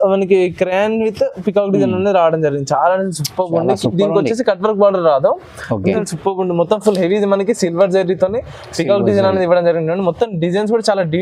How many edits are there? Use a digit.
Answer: 1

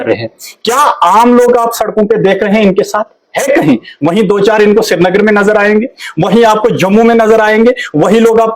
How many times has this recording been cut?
0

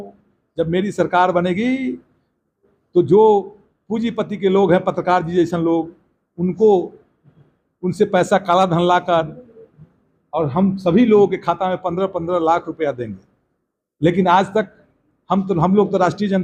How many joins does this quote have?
0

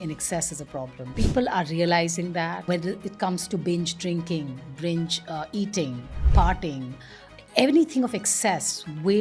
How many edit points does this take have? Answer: 2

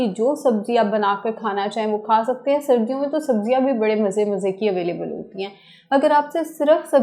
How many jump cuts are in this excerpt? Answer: 0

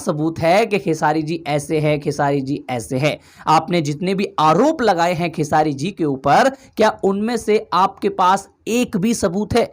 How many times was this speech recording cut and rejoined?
0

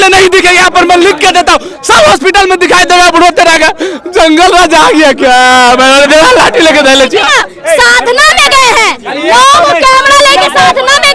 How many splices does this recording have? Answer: 1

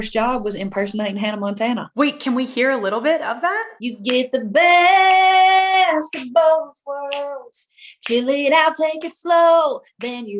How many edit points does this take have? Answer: 2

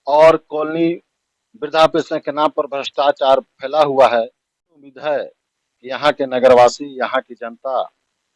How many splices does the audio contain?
1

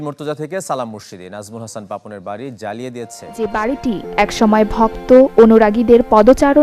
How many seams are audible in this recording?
1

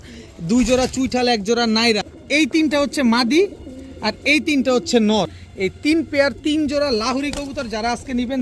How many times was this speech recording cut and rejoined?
2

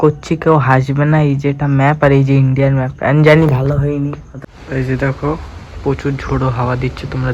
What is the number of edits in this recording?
1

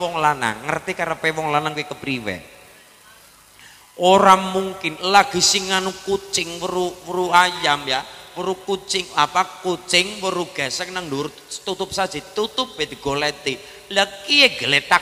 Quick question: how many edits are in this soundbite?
0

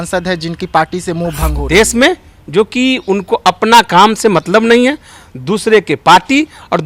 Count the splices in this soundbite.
1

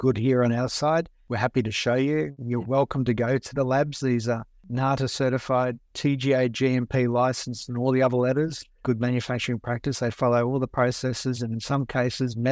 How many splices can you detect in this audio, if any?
0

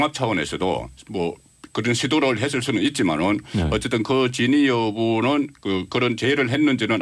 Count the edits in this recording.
1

